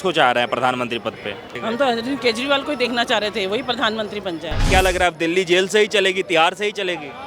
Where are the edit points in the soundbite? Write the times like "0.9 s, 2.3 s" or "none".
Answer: 1.6 s, 4.7 s